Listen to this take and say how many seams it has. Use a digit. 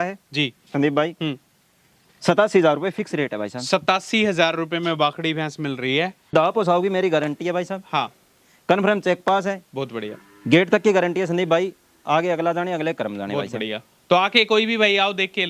1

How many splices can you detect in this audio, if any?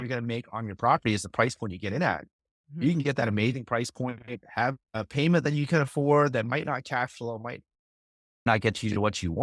1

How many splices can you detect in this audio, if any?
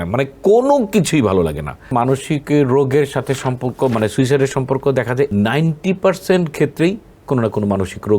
2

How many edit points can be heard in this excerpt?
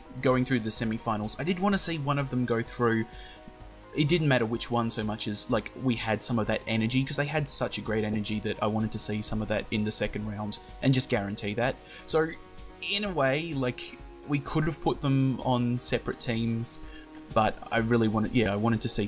1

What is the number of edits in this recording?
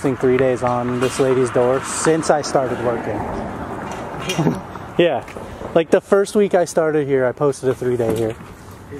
0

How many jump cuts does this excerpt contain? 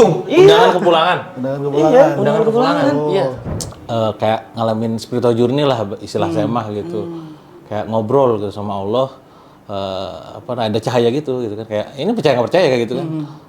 1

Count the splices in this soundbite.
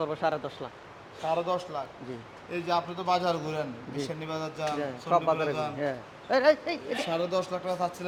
0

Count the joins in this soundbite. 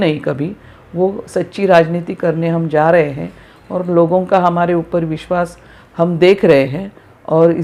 0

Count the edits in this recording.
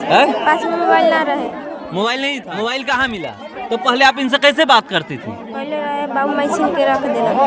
1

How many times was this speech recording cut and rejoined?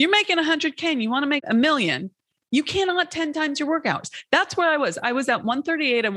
1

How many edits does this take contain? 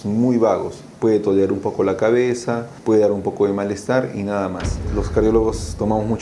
2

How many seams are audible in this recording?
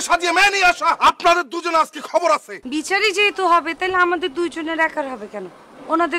2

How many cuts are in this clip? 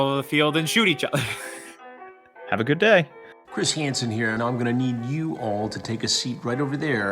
1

